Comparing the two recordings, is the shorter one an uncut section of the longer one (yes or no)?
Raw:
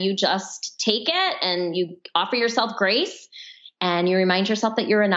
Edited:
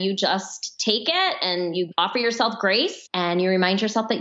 no